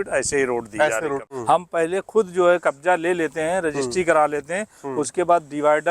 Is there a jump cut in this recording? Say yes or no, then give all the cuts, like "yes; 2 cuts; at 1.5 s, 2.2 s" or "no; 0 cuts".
yes; 1 cut; at 1.2 s